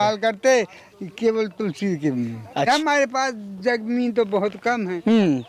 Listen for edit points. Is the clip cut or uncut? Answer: cut